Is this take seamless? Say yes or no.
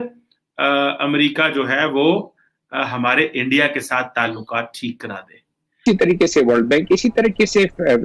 no